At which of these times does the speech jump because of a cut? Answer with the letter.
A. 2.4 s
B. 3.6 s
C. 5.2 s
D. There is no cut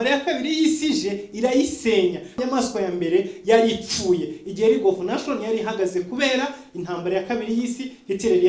A